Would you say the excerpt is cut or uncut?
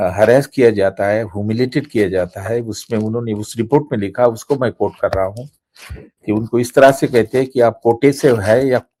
uncut